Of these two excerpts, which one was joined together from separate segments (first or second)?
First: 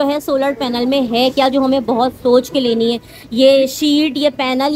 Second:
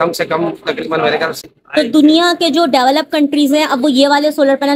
second